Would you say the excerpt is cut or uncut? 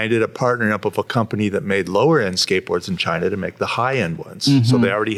uncut